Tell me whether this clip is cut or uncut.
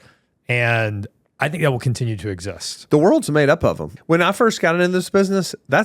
cut